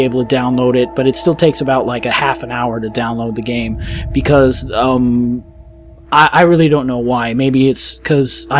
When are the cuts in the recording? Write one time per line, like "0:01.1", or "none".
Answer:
0:02.5